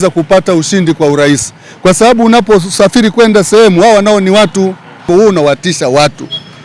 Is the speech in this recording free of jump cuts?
no; 1 cut; at 5.1 s

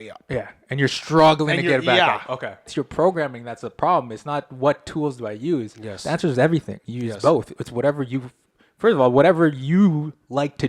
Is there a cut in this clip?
yes; 1 cut; at 2.7 s

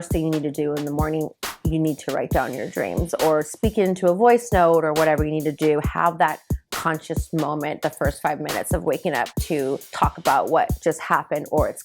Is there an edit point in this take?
yes; 1 cut; at 9.9 s

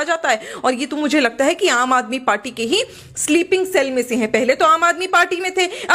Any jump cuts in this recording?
no; 0 cuts

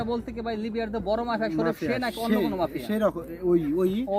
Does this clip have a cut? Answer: no; 0 cuts

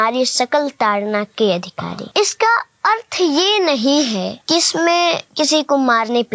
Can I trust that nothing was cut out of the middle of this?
no; 3 cuts; at 2.0 s, 4.4 s, 5.3 s

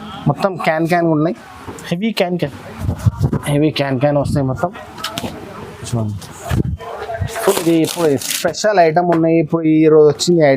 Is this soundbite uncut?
no; 1 cut; at 7.5 s

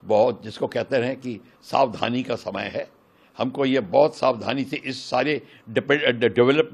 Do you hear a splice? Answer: no; 0 cuts

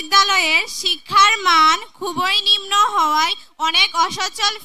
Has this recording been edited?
no; 0 cuts

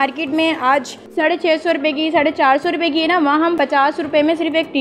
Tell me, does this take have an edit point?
yes; 2 cuts; at 1.0 s, 3.6 s

